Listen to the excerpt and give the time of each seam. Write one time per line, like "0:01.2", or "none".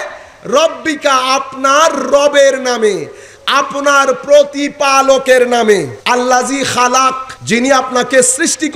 0:06.0
0:07.3